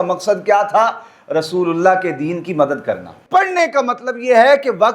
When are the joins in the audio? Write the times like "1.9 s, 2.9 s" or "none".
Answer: 3.2 s